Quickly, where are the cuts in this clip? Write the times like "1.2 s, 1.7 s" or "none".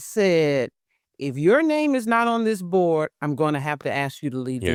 none